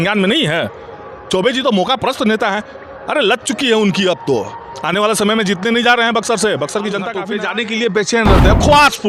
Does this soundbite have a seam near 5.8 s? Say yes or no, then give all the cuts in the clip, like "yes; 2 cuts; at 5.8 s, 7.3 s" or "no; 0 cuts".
no; 1 cut; at 7.2 s